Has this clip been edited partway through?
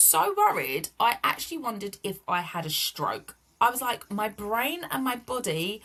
no; 0 cuts

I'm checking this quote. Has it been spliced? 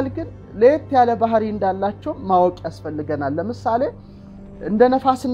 no; 0 cuts

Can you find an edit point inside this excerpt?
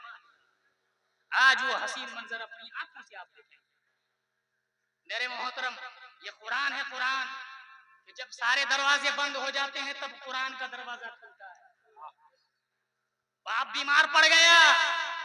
no; 0 cuts

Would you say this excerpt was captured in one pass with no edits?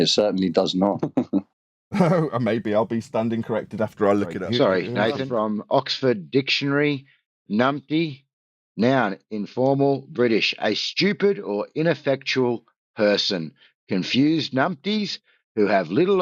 no; 3 cuts; at 1.1 s, 4.3 s, 5.2 s

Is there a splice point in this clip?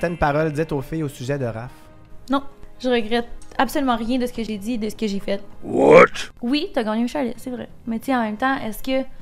yes; 1 cut; at 6.3 s

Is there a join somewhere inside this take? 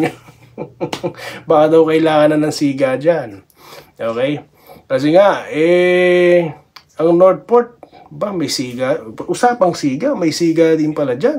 no; 0 cuts

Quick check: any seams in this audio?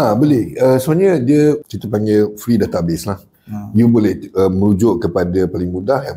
yes; 1 cut; at 1.6 s

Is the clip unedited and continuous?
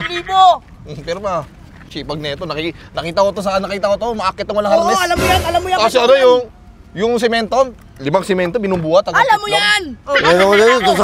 yes; 0 cuts

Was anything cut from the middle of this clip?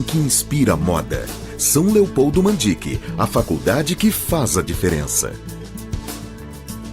yes; 1 cut; at 5.3 s

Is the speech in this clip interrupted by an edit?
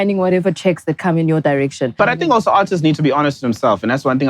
yes; 1 cut; at 1.9 s

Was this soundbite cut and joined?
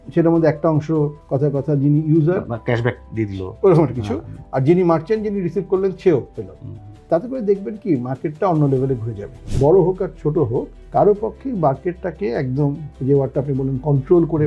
yes; 2 cuts; at 9.4 s, 12.9 s

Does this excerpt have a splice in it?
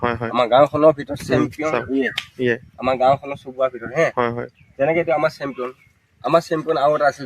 no; 0 cuts

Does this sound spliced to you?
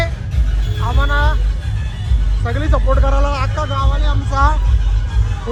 no; 0 cuts

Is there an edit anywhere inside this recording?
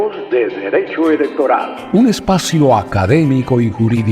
yes; 1 cut; at 1.8 s

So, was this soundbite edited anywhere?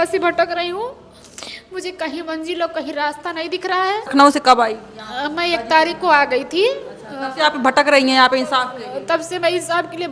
yes; 1 cut; at 4.1 s

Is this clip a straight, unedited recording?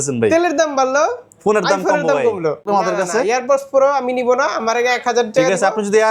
no; 1 cut; at 2.6 s

